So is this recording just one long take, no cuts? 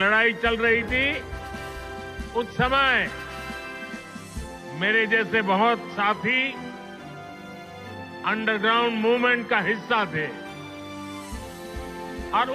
no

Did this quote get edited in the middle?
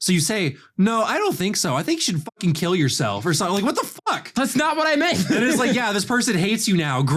no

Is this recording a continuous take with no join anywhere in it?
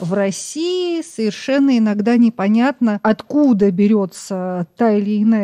no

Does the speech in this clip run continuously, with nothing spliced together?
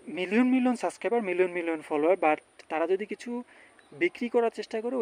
yes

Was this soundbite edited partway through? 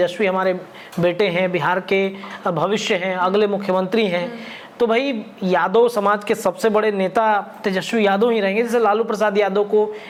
no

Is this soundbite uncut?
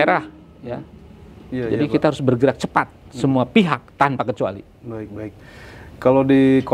yes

